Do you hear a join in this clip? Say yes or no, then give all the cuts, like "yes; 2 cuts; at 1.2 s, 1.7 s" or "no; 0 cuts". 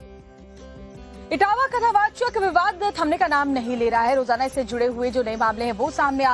yes; 1 cut; at 1.1 s